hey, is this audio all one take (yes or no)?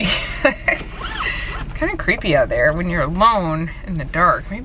yes